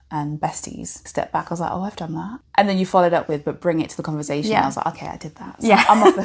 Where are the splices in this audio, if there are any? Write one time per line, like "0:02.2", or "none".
0:01.0
0:02.4